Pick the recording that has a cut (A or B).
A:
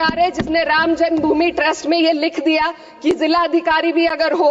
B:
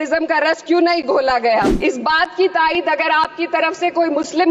B